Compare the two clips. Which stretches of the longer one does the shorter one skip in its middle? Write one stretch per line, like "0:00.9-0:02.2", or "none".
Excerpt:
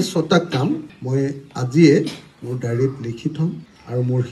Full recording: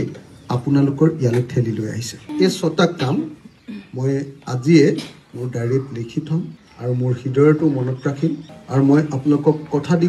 0:03.4-0:03.9